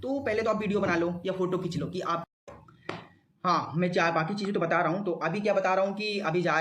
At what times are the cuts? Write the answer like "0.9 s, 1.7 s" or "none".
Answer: 2.2 s

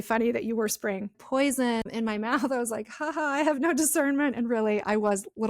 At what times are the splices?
1.2 s, 1.9 s

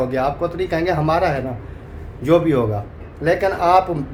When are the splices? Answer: none

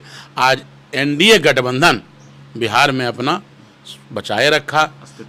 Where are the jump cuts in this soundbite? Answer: none

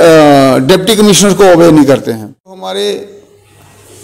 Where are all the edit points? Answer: 2.6 s

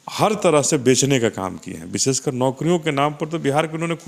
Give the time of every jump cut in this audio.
none

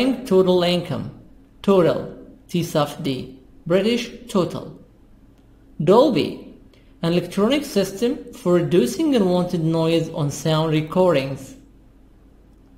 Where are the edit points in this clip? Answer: 10.2 s

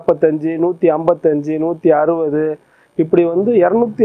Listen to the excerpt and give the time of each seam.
none

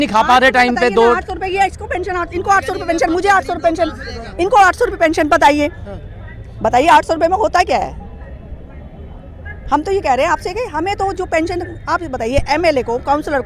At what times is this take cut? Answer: none

